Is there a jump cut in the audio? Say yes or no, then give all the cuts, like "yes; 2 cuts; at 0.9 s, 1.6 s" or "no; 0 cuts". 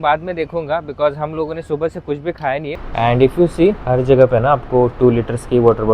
yes; 1 cut; at 2.7 s